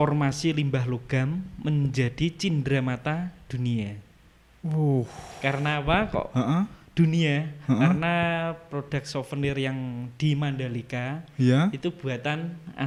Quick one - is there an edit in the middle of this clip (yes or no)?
no